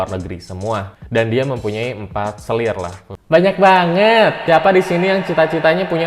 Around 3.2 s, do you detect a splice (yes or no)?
no